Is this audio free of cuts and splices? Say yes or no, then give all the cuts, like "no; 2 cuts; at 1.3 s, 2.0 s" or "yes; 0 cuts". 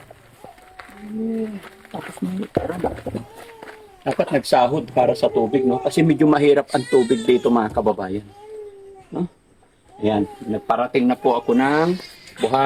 yes; 0 cuts